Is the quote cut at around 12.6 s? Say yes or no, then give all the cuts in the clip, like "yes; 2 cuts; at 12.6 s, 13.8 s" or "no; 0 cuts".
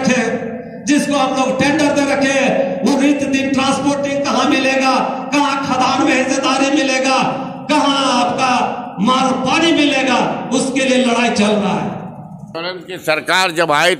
yes; 1 cut; at 12.6 s